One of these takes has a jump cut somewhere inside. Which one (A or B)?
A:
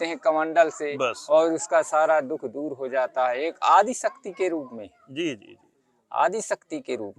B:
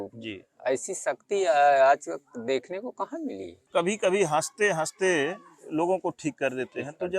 B